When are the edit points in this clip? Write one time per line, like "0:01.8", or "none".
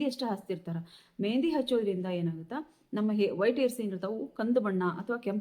none